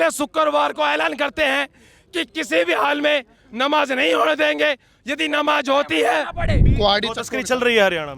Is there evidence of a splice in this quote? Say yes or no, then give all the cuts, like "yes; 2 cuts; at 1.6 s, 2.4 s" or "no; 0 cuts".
yes; 1 cut; at 6.6 s